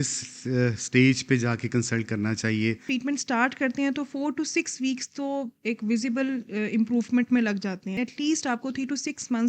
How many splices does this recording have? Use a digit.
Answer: 2